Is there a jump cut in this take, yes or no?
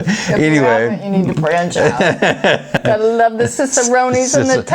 yes